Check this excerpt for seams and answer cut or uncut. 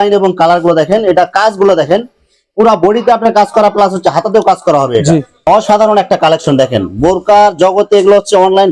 cut